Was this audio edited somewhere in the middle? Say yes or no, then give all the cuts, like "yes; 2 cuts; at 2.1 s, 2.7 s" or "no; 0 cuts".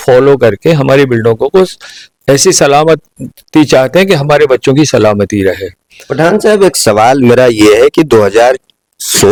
no; 0 cuts